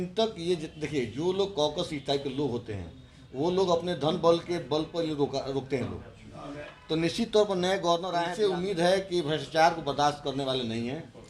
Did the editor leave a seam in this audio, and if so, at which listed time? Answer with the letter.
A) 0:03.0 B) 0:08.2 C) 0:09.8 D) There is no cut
B